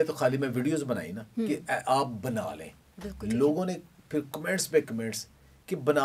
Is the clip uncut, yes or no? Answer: yes